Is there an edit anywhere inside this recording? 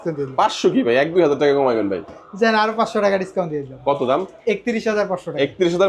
no; 0 cuts

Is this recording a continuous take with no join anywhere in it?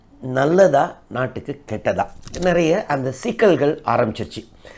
no; 1 cut; at 2.2 s

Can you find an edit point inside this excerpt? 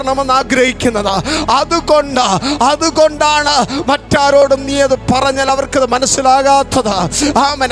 no; 0 cuts

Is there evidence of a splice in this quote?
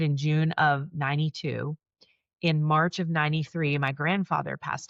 no; 0 cuts

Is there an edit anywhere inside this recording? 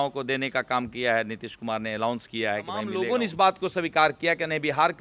yes; 1 cut; at 2.9 s

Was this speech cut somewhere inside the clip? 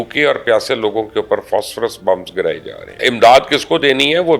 yes; 1 cut; at 3.0 s

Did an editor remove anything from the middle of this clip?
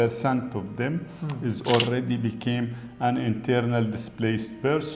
no; 0 cuts

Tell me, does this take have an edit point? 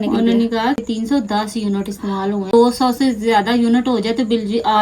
yes; 2 cuts; at 0.8 s, 2.5 s

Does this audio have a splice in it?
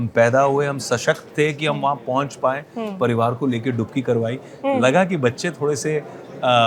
no; 0 cuts

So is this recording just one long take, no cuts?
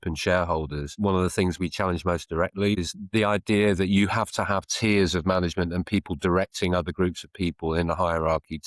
no; 2 cuts; at 0.9 s, 2.8 s

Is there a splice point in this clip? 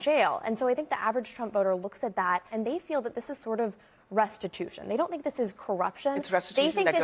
yes; 1 cut; at 2.5 s

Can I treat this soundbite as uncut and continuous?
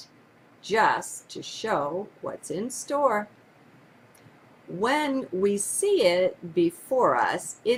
yes; 0 cuts

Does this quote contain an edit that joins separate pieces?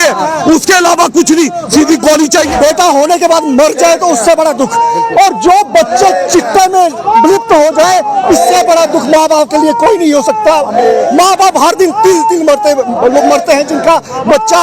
yes; 1 cut; at 2.5 s

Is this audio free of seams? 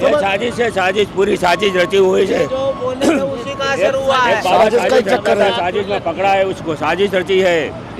yes; 0 cuts

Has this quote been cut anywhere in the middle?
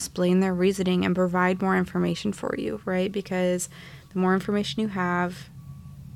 no; 0 cuts

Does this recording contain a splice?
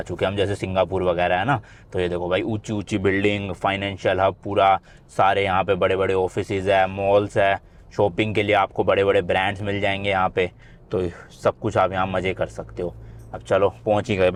no; 0 cuts

